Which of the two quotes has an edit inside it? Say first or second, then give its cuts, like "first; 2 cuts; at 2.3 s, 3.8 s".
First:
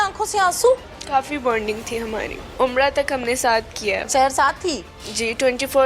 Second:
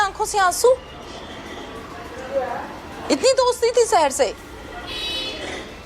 first; 2 cuts; at 0.9 s, 2.4 s